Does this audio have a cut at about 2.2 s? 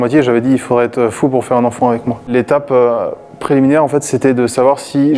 no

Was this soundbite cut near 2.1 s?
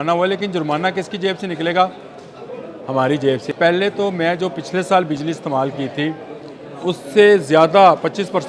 no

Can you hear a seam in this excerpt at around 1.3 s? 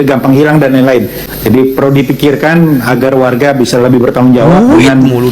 yes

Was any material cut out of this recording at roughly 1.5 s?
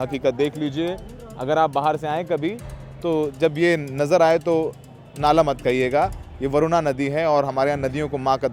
no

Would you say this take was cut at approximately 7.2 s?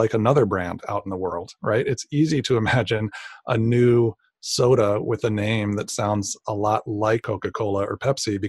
yes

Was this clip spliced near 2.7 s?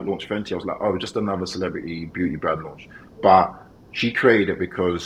no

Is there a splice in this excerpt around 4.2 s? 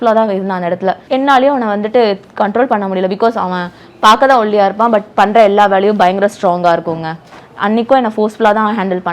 no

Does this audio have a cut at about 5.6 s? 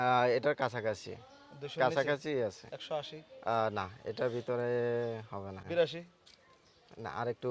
yes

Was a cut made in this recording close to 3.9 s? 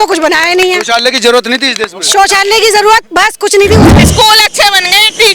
yes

